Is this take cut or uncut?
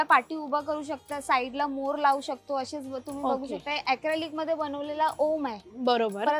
uncut